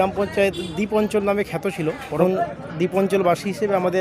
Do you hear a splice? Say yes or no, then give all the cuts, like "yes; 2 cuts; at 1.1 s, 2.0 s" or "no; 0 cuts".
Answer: yes; 1 cut; at 2.2 s